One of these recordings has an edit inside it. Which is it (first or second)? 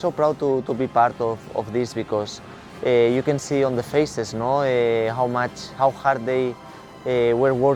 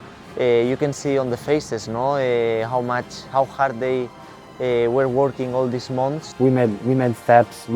second